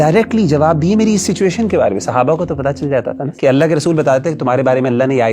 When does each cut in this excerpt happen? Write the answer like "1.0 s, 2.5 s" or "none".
3.3 s

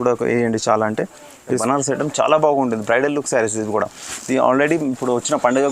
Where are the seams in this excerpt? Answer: 1.6 s

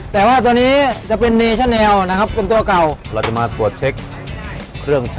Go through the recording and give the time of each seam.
3.1 s

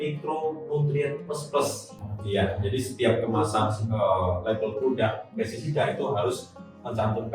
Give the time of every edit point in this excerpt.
2.0 s

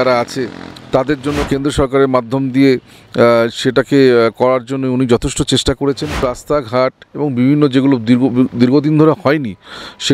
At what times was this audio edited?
1.4 s, 6.4 s

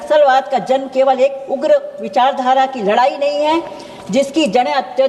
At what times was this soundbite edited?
none

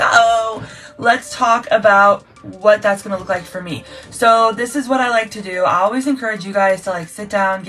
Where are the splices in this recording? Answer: none

